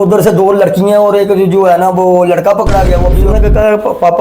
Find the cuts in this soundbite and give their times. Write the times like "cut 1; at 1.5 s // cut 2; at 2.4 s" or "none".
cut 1; at 3.2 s